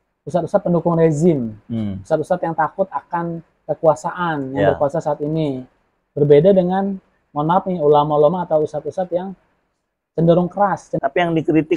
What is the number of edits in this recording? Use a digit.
1